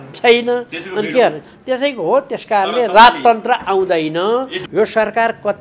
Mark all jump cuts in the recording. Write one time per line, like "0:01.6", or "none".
0:04.6

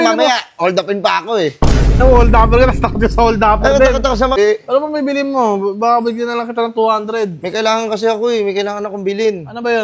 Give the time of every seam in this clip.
0:04.3

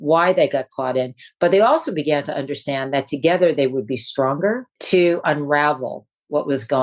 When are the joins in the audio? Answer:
0:04.7

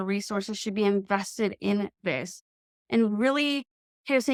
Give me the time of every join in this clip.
none

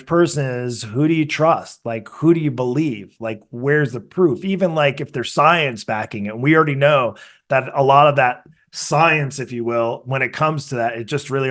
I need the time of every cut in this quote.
none

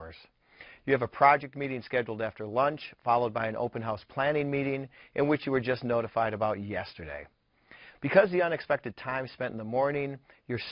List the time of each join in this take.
0:02.9

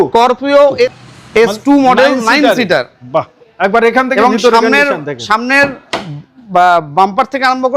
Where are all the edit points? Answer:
0:01.0

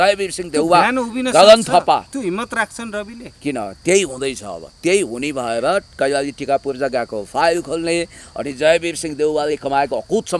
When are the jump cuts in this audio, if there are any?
none

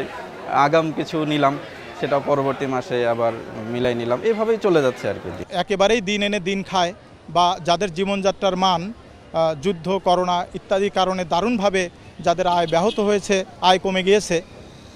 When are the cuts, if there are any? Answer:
none

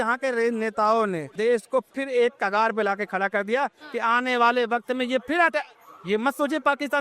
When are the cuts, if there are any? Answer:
none

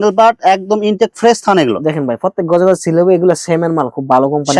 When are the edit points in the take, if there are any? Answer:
none

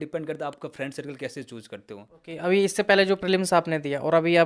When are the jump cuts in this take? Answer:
0:02.2

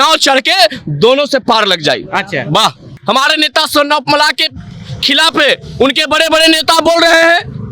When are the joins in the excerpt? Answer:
0:02.9

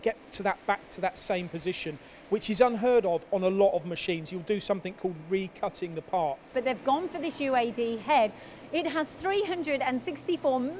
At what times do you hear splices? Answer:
0:06.5
0:09.2

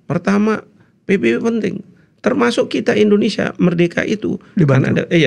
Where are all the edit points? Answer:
none

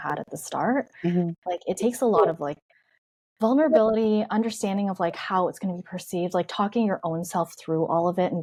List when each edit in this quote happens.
none

